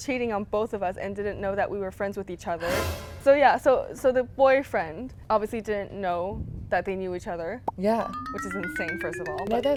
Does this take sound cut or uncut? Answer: uncut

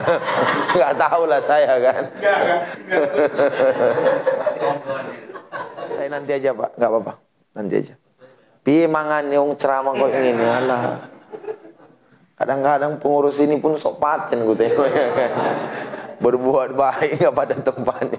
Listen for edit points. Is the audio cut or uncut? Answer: cut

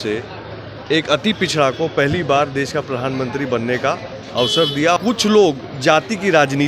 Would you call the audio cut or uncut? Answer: cut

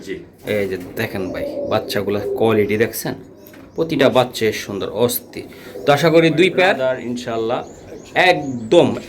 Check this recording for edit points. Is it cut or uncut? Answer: cut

